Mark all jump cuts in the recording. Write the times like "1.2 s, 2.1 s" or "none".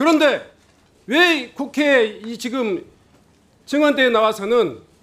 none

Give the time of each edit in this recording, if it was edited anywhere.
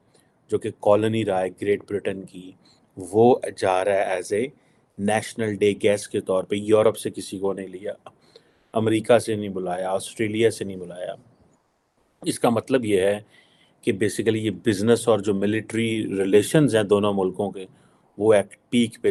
none

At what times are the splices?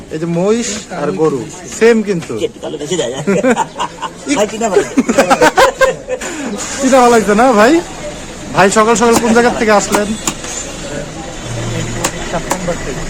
none

